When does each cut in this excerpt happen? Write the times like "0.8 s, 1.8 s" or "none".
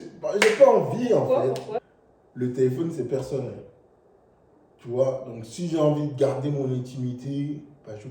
1.9 s